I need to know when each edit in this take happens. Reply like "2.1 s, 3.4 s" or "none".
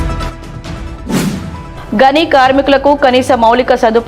1.2 s